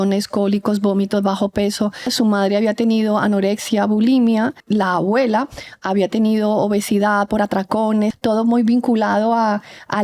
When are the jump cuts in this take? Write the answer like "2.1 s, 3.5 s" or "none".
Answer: 2.1 s, 4.6 s, 8.1 s